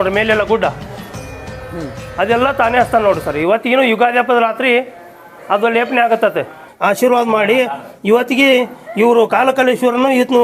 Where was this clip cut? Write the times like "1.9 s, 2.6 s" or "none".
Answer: 6.6 s